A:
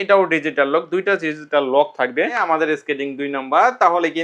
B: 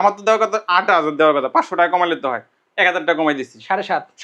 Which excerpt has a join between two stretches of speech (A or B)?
A